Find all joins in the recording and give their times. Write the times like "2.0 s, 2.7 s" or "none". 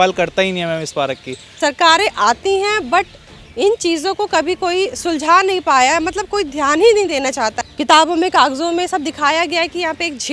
1.5 s, 7.6 s